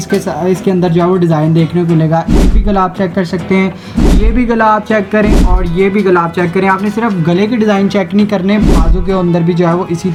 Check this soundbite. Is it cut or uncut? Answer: uncut